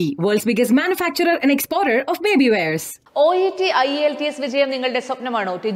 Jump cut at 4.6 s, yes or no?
no